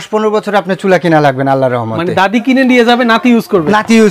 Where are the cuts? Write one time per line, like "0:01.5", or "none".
none